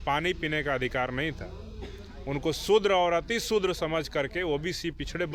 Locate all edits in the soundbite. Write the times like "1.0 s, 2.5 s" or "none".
none